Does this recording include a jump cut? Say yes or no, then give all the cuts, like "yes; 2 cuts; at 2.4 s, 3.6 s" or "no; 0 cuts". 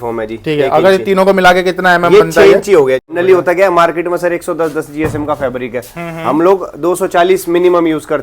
yes; 1 cut; at 3.1 s